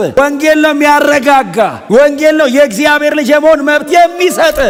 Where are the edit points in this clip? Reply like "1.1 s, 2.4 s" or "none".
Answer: none